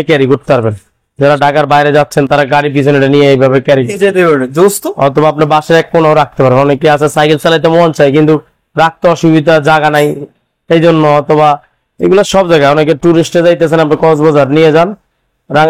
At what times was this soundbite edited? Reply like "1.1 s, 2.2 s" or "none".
none